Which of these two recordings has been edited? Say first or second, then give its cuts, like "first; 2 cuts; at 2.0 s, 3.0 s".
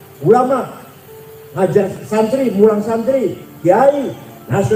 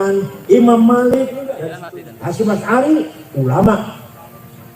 second; 1 cut; at 1.7 s